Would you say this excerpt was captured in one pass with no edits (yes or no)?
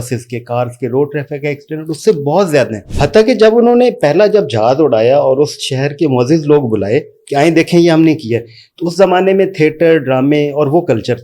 no